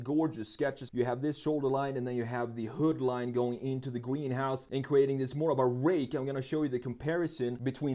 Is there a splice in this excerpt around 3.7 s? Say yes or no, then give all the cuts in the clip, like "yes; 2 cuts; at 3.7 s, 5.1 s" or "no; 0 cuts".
no; 1 cut; at 0.9 s